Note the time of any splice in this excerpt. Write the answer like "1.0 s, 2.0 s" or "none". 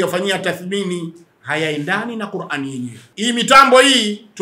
3.0 s